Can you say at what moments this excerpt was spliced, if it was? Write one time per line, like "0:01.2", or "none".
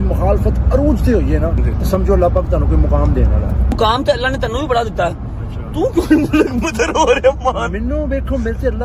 0:01.6
0:03.8